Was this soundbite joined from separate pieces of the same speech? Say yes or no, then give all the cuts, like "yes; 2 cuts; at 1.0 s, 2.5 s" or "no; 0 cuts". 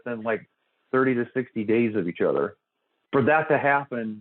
yes; 1 cut; at 2.9 s